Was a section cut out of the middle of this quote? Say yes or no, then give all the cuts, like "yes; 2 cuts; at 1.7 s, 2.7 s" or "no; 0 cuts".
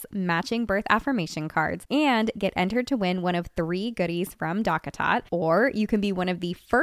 no; 0 cuts